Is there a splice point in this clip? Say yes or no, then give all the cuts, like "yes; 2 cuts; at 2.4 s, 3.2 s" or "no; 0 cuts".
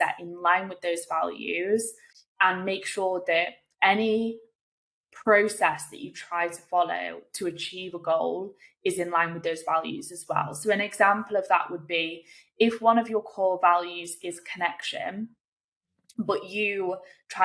no; 0 cuts